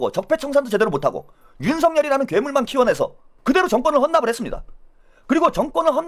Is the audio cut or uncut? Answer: uncut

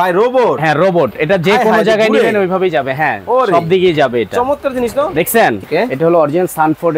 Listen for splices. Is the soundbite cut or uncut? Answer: cut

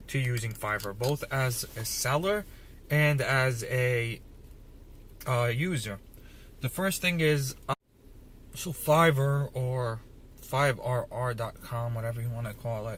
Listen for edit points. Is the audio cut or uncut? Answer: uncut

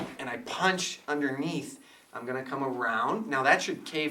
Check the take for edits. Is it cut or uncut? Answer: uncut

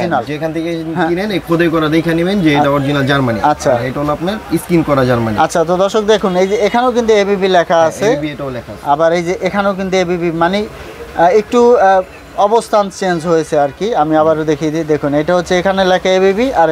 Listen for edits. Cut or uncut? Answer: uncut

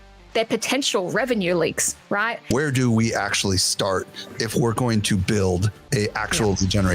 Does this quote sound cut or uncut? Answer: cut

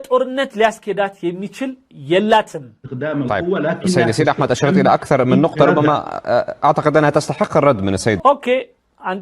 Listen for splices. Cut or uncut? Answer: uncut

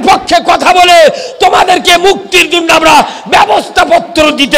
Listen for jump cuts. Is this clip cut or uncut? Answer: uncut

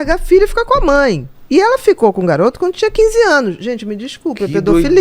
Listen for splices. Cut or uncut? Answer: cut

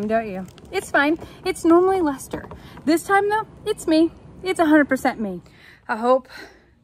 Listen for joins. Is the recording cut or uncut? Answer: cut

